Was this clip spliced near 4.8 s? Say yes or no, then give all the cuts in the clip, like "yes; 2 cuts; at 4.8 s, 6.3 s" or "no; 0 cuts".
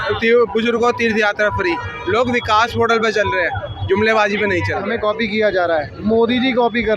yes; 1 cut; at 4.8 s